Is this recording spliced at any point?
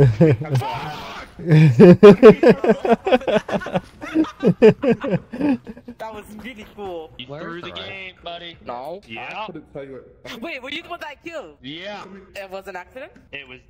no; 0 cuts

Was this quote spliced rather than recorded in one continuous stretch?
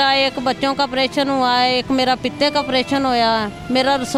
no; 0 cuts

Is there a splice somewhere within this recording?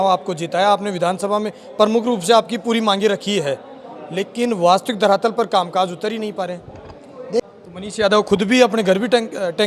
yes; 1 cut; at 7.5 s

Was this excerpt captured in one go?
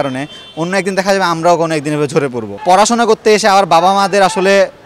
no; 1 cut; at 2.5 s

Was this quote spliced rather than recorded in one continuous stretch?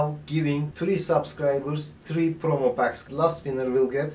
no; 0 cuts

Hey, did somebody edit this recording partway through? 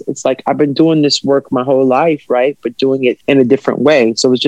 yes; 1 cut; at 3.2 s

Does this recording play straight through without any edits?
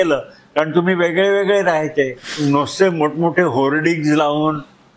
no; 1 cut; at 2.4 s

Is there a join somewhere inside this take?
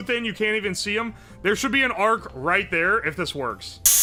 no; 0 cuts

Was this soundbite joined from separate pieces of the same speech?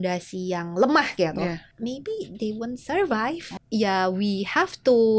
yes; 2 cuts; at 1.7 s, 3.5 s

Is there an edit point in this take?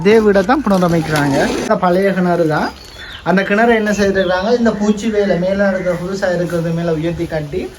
yes; 1 cut; at 1.7 s

